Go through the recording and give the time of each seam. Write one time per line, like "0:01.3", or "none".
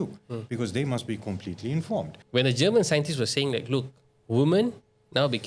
0:02.2